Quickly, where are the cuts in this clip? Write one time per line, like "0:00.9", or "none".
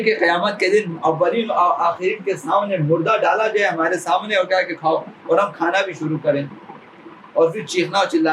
none